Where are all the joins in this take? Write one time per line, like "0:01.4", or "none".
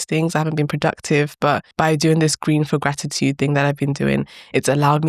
0:01.7